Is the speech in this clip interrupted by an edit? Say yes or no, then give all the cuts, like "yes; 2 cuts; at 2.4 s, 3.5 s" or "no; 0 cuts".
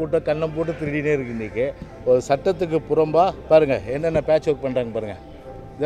yes; 1 cut; at 1.9 s